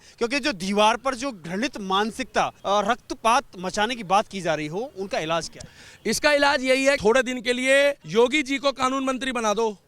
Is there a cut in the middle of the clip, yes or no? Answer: yes